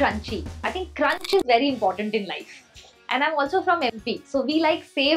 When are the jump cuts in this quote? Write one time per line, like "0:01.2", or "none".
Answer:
none